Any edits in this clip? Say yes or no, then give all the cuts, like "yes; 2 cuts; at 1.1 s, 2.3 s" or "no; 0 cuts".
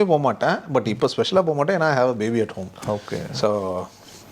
no; 0 cuts